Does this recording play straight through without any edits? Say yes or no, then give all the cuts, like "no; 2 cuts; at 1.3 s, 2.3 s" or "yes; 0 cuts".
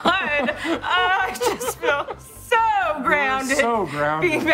yes; 0 cuts